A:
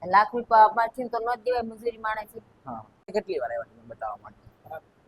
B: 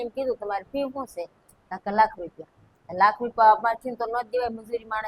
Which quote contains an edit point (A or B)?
A